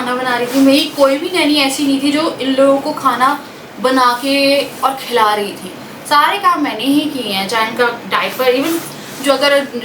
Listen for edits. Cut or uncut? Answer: uncut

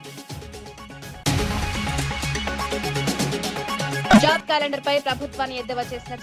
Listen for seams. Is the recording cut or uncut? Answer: uncut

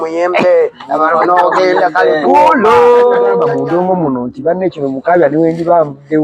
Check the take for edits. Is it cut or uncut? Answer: cut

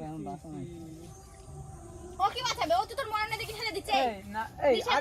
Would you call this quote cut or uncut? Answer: uncut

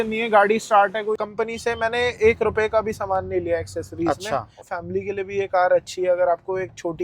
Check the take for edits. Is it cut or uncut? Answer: cut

